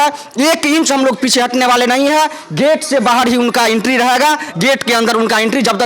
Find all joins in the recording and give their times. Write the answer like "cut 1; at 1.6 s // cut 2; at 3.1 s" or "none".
none